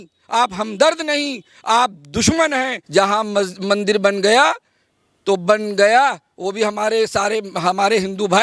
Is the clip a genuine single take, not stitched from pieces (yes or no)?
no